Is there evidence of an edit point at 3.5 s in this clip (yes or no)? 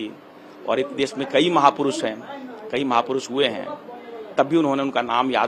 no